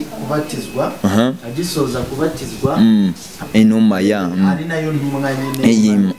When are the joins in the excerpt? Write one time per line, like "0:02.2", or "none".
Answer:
0:03.4